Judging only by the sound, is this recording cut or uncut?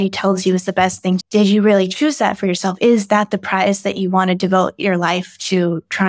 cut